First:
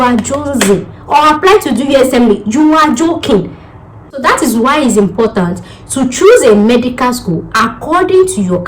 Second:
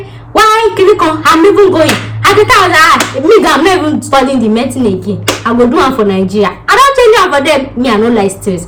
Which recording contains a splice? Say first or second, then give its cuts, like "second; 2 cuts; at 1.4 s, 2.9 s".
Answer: first; 1 cut; at 4.2 s